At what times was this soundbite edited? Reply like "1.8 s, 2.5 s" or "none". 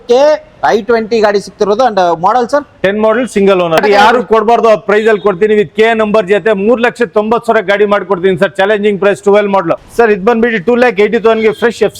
3.8 s, 9.8 s

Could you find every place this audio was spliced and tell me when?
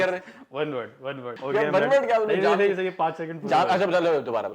1.3 s

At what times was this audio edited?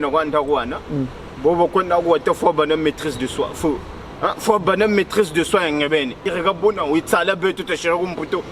6.3 s

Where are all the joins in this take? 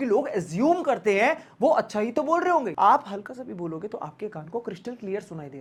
none

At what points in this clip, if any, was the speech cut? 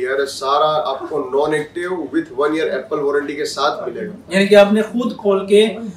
none

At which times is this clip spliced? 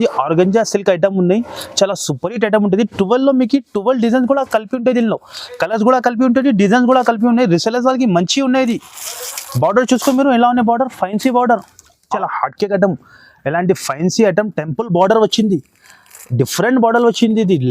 12.1 s

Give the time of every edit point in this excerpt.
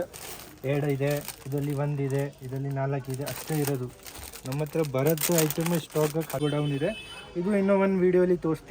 6.4 s

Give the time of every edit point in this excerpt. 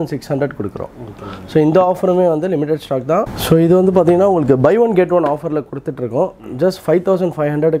3.4 s

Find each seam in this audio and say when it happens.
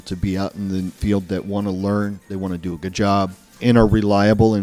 0.9 s, 3.5 s

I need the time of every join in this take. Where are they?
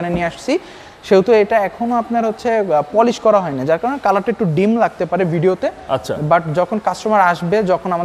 none

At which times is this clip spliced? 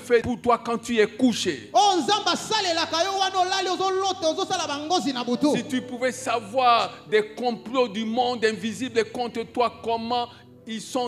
none

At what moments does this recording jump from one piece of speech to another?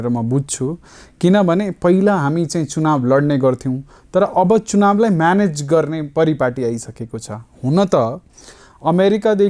none

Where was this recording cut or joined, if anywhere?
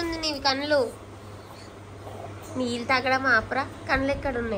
none

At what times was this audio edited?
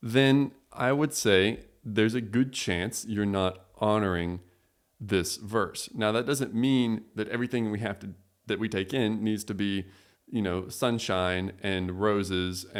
none

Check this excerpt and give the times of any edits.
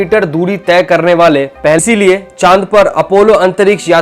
1.8 s

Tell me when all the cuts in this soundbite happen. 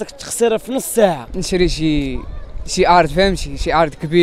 1.3 s

